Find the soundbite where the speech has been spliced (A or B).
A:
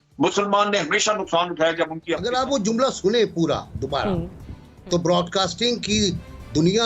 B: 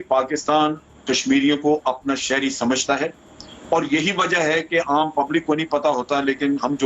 A